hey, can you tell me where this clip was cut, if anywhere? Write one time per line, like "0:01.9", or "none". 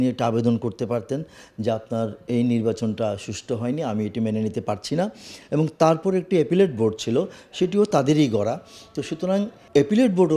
none